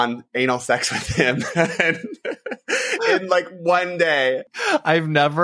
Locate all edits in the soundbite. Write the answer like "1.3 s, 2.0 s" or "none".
4.5 s